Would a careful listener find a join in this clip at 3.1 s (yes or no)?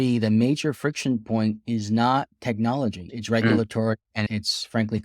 yes